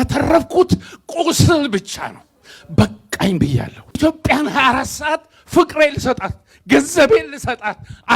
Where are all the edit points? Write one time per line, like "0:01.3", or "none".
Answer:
0:04.0